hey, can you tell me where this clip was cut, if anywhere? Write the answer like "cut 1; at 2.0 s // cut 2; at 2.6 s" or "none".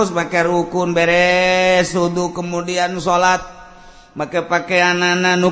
none